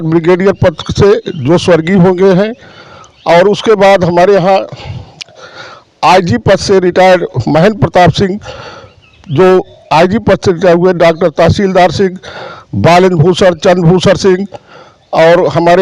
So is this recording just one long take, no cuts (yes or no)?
yes